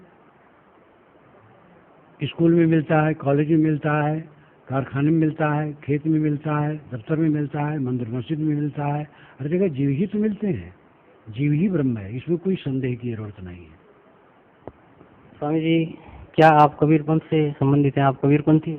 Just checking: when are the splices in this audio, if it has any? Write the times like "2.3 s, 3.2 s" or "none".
14.5 s